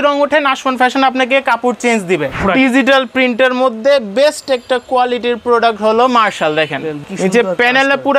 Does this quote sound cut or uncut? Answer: cut